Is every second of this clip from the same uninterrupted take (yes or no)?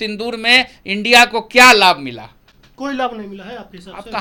yes